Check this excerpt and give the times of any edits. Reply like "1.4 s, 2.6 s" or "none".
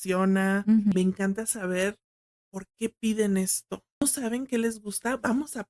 0.9 s, 4.0 s